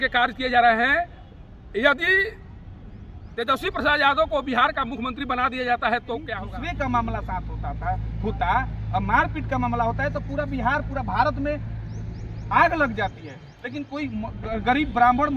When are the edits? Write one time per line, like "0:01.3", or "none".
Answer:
0:06.4